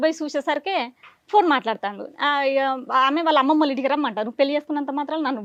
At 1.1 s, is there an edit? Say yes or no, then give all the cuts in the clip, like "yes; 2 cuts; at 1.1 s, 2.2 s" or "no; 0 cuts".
no; 0 cuts